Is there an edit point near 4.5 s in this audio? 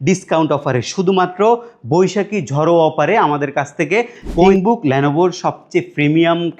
yes; 1 cut; at 4.5 s

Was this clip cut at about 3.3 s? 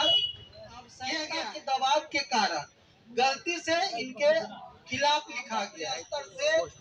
no; 2 cuts; at 1.2 s, 5.7 s

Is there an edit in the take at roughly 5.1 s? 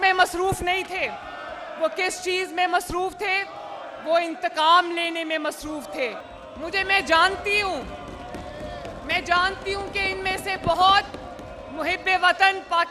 no; 1 cut; at 6.3 s

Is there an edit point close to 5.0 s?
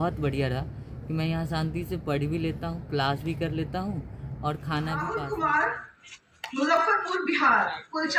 yes; 1 cut; at 5.0 s

